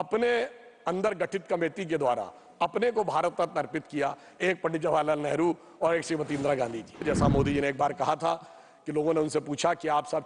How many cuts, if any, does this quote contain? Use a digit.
1